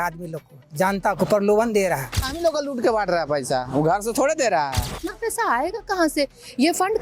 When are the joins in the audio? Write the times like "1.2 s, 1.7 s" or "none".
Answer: 2.3 s, 5.1 s